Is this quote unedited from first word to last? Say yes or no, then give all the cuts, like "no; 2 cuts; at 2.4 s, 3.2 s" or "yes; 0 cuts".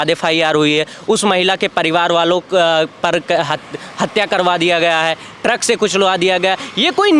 yes; 0 cuts